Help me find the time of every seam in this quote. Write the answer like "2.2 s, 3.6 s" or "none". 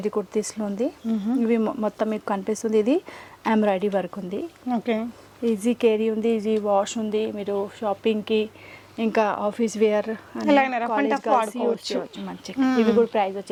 none

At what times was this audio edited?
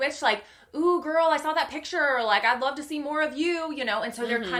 none

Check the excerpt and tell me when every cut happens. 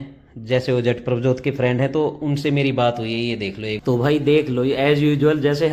3.8 s

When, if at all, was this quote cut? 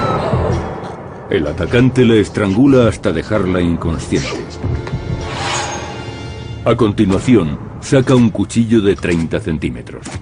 5.1 s

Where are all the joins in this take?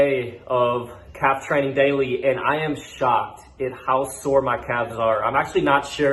none

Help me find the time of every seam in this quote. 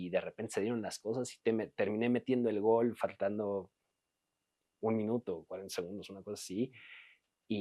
none

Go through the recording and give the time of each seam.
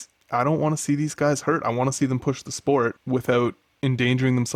3.0 s

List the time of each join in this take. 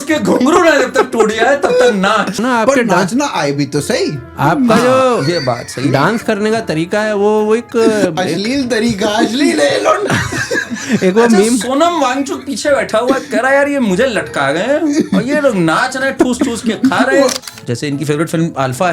2.4 s, 17.4 s

